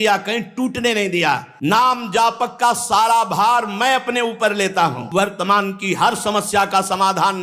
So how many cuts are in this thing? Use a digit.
2